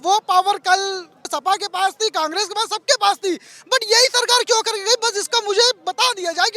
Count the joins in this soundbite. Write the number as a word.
one